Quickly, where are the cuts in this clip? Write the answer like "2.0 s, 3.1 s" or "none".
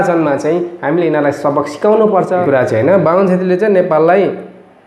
2.4 s